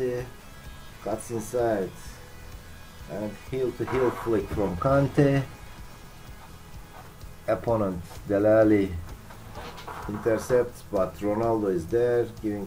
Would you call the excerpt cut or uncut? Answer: uncut